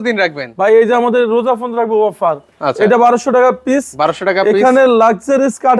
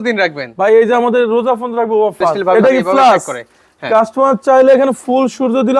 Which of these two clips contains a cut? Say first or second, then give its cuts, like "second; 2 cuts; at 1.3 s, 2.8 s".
second; 1 cut; at 2.4 s